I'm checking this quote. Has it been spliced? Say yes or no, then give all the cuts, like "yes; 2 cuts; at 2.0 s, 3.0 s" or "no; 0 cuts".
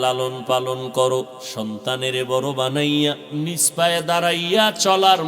yes; 2 cuts; at 1.4 s, 3.2 s